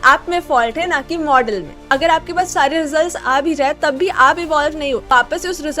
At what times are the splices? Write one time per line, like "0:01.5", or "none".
0:01.9
0:05.0